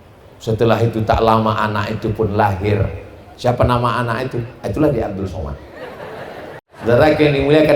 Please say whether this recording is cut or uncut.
cut